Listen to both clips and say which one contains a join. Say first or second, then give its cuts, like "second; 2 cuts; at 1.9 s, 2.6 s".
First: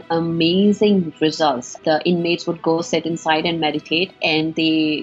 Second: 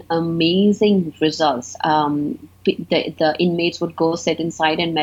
first; 2 cuts; at 1.8 s, 4.2 s